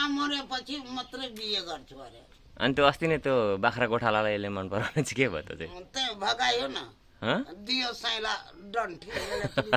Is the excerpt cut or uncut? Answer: uncut